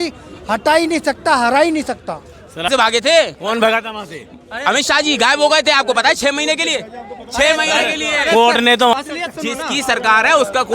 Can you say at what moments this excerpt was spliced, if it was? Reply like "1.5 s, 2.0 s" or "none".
2.7 s, 8.9 s